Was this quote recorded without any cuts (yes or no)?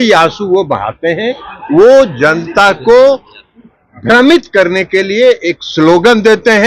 yes